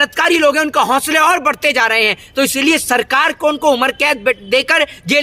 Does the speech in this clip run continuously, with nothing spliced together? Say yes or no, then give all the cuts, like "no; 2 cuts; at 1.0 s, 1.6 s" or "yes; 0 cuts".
yes; 0 cuts